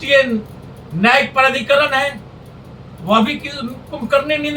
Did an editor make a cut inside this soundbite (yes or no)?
no